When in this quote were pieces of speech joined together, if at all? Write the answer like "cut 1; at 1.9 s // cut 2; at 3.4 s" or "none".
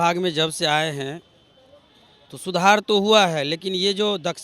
none